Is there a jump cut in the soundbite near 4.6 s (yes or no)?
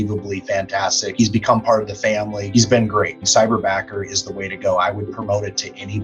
no